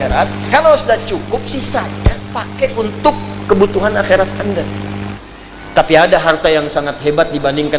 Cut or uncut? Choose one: cut